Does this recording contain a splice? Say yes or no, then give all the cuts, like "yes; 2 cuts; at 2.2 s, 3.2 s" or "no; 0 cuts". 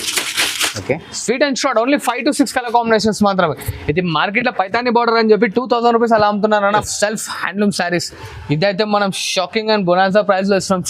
yes; 1 cut; at 6.9 s